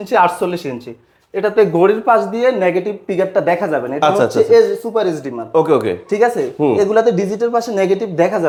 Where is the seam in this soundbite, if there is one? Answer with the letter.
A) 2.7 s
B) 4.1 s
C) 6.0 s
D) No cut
D